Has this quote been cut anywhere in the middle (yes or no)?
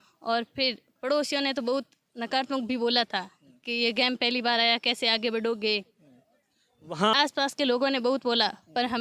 yes